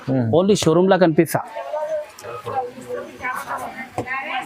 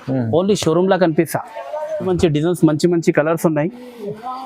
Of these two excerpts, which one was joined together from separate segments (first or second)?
second